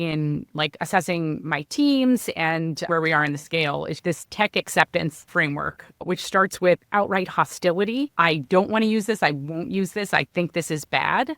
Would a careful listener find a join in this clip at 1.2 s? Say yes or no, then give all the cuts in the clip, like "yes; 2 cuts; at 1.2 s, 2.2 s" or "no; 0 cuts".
no; 4 cuts; at 2.9 s, 3.9 s, 5.2 s, 8.1 s